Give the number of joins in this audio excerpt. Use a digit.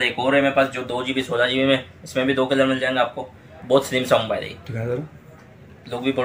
1